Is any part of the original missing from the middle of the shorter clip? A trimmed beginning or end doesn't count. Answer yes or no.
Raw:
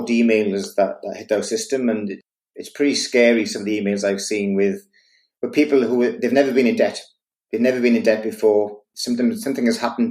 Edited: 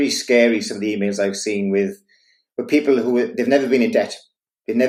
no